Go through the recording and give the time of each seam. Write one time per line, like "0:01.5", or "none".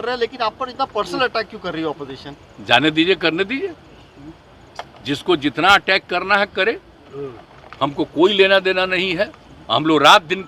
none